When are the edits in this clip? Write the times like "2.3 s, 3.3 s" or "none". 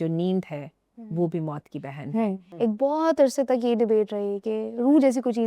2.4 s